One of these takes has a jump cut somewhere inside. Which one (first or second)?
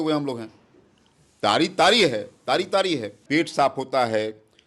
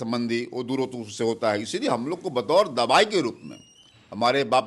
first